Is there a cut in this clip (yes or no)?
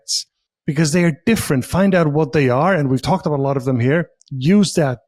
no